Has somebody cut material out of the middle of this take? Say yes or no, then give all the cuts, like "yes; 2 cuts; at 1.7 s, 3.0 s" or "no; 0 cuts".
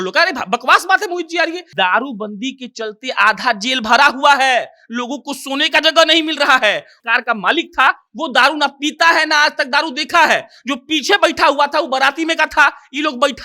yes; 2 cuts; at 1.6 s, 6.9 s